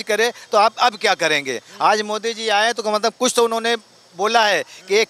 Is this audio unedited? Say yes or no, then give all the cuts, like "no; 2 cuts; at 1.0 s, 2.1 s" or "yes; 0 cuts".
yes; 0 cuts